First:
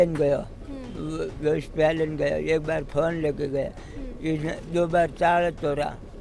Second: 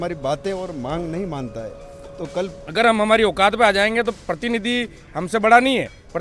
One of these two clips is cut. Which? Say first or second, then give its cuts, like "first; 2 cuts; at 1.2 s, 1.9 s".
second; 1 cut; at 2.6 s